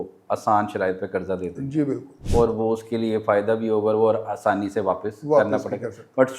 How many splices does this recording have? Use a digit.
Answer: 0